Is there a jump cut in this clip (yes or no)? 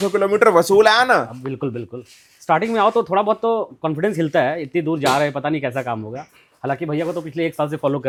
no